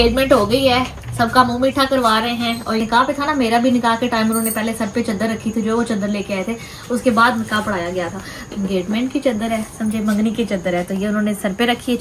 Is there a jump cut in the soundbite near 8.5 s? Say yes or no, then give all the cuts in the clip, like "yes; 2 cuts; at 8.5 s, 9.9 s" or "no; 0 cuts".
yes; 2 cuts; at 2.8 s, 8.5 s